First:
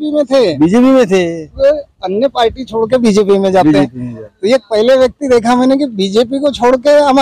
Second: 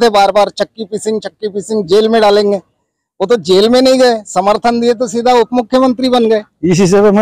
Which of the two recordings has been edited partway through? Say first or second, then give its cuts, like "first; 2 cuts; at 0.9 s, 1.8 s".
first; 1 cut; at 1.5 s